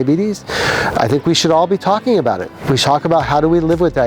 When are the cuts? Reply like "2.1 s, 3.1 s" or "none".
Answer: none